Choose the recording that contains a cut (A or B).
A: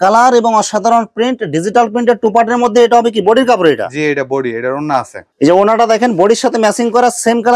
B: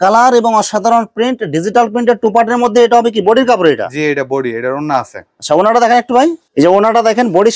A